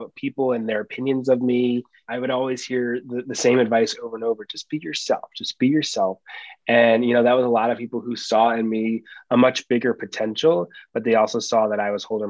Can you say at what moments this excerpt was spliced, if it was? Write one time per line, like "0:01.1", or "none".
0:02.0